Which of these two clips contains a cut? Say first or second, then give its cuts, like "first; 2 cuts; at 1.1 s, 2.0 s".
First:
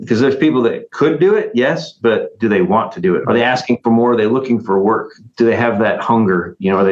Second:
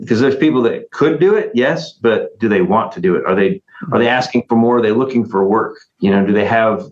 first; 2 cuts; at 3.2 s, 5.2 s